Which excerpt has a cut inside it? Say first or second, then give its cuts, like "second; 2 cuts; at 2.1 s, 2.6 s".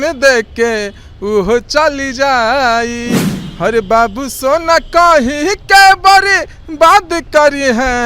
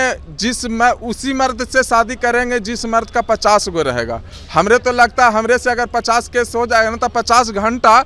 first; 1 cut; at 3.3 s